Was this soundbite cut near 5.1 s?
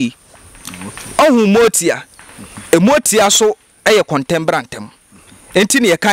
no; 1 cut; at 1.2 s

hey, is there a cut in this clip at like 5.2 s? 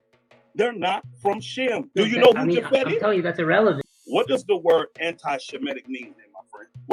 no; 1 cut; at 3.9 s

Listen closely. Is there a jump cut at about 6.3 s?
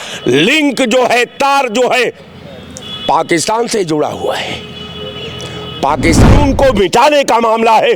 yes; 1 cut; at 6.3 s

